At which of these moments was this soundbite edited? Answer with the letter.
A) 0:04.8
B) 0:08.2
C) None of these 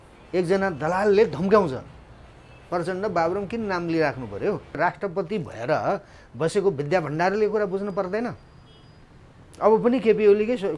A